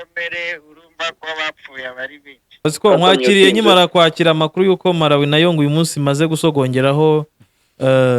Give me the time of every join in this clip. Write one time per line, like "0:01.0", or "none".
0:02.6